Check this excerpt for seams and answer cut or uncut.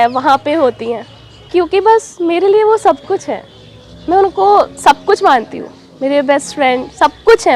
cut